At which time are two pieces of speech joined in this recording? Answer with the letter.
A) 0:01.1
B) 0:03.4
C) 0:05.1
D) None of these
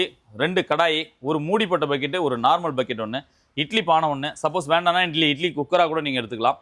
D